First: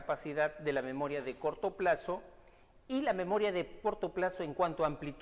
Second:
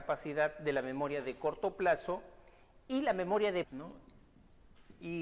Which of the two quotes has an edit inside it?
first; 1 cut; at 3.7 s

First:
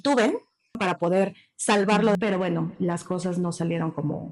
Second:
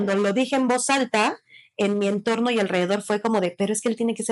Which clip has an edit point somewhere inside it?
first; 2 cuts; at 0.8 s, 2.1 s

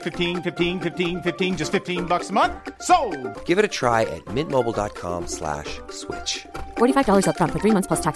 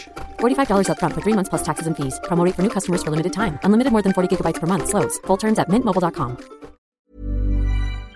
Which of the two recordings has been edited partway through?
second; 1 cut; at 6.9 s

